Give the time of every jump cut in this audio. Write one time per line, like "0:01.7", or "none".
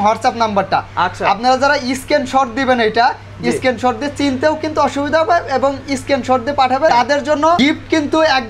0:07.2